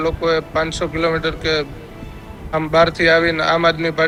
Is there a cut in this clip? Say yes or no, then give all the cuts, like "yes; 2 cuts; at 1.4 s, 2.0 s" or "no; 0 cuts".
no; 0 cuts